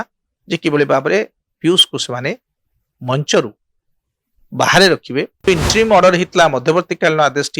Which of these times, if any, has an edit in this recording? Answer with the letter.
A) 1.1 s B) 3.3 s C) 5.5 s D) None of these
C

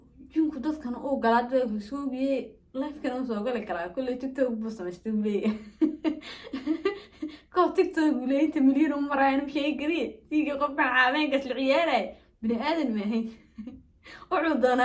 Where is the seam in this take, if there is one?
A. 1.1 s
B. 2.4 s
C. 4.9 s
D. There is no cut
D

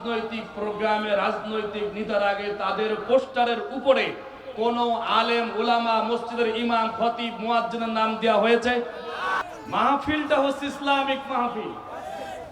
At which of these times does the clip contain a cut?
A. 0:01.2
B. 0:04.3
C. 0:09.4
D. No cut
C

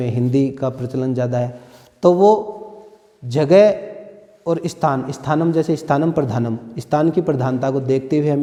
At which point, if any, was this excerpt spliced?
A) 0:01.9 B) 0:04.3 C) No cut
C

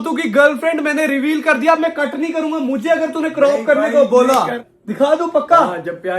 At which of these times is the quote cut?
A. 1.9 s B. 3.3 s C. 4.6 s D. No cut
C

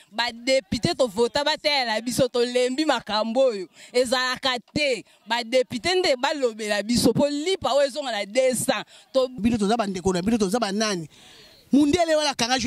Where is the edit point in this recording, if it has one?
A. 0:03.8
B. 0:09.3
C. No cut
B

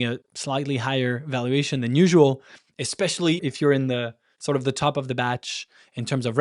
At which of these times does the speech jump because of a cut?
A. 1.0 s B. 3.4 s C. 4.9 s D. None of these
B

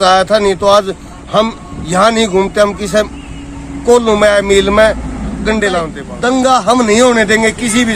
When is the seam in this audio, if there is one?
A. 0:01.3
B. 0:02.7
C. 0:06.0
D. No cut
C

